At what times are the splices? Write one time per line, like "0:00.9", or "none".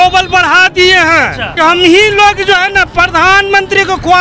0:01.5